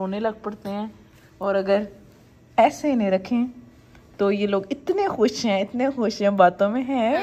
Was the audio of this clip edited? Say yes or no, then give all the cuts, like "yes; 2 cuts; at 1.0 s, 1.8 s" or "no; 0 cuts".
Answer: no; 0 cuts